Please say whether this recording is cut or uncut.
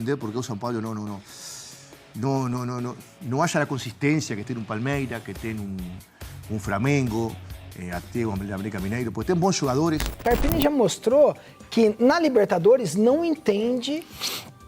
cut